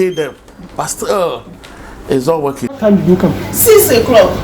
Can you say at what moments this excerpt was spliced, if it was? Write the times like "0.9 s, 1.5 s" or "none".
2.8 s